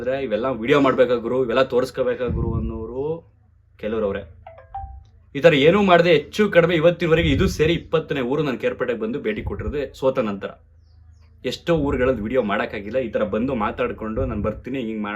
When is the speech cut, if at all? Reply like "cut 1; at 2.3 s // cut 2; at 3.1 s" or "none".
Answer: none